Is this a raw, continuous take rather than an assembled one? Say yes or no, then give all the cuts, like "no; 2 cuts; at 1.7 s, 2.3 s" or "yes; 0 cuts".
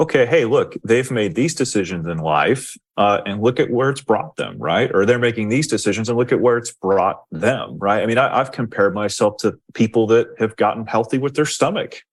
yes; 0 cuts